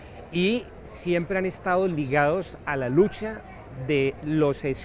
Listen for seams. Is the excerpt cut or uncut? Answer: cut